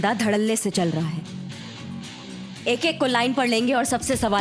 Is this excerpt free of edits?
yes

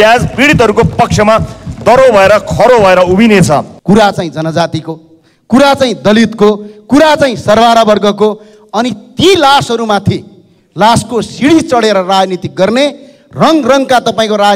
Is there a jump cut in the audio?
yes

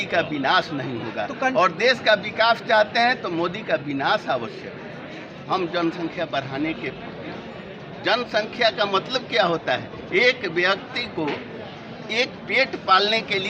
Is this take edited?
yes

